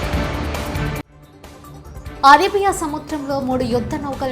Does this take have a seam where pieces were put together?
yes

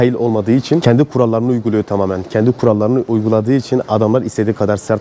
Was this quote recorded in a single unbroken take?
yes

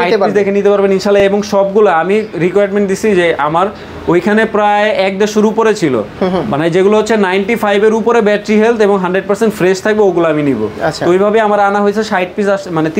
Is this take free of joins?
yes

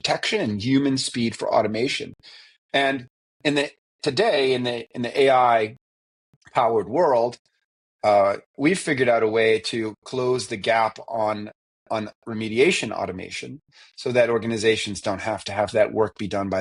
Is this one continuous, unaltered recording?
yes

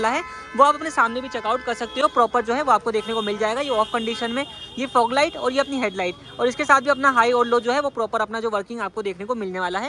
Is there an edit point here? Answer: no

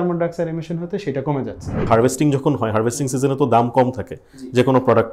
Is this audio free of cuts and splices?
no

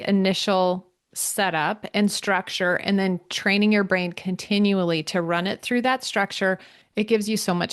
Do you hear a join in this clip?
yes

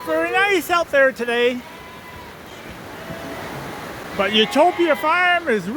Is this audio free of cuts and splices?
yes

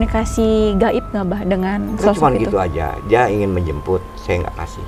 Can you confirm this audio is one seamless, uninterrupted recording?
yes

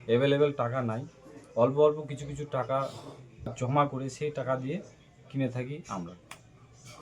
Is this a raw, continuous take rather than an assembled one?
no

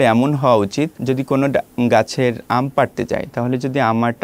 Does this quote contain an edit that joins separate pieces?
yes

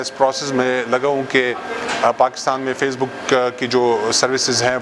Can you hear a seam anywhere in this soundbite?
no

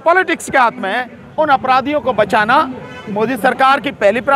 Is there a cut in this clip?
yes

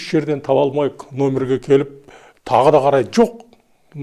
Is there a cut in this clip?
no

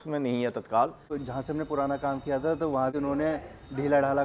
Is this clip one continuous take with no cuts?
no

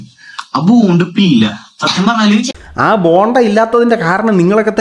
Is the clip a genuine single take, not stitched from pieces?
yes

